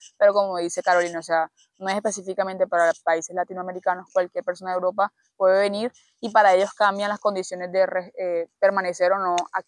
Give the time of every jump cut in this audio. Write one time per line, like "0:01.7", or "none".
none

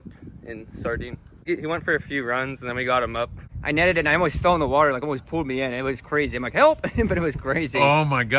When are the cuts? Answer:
0:01.3
0:03.5

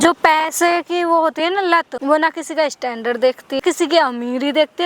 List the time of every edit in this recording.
0:01.9
0:03.6

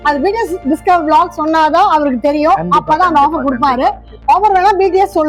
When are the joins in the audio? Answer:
none

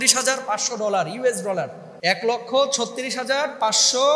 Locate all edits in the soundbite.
0:01.8

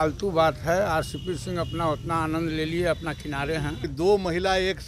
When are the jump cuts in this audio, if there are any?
0:03.9

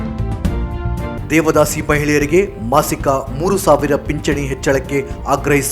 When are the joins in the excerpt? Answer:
0:01.1

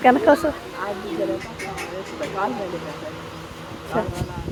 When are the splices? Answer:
none

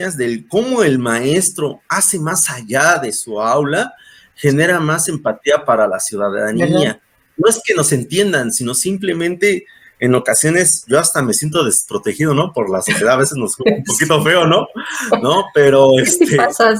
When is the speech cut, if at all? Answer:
none

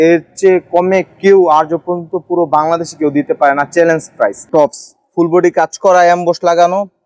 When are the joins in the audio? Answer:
0:04.4

